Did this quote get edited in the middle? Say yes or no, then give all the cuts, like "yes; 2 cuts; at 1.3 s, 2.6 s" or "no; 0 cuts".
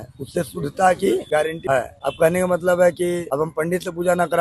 yes; 2 cuts; at 1.6 s, 3.2 s